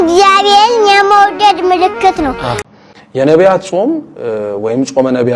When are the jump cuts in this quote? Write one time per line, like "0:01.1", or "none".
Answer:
0:02.5

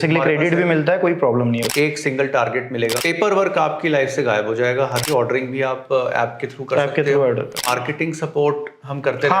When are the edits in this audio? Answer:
0:01.7
0:03.0
0:05.0
0:07.7

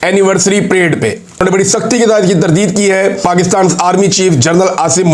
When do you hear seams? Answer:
0:01.4
0:03.2

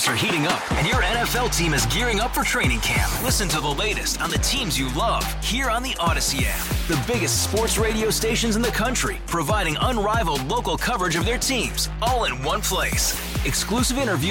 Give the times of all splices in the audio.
none

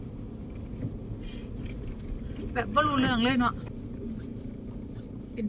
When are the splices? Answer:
0:03.7

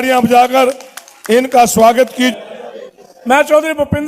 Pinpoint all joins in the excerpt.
0:02.3

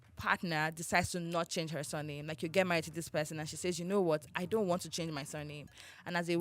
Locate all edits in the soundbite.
none

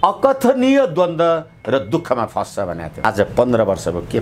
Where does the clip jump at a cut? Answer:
0:03.0

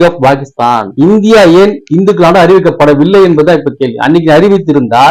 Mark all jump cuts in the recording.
0:00.9

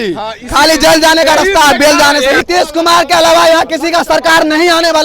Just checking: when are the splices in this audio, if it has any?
0:02.4

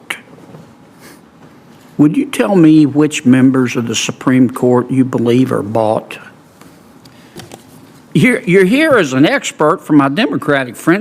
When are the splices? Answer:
0:07.4

